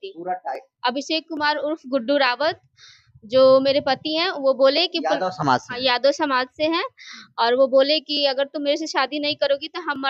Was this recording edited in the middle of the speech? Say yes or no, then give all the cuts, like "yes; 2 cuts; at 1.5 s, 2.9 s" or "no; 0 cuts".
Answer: no; 0 cuts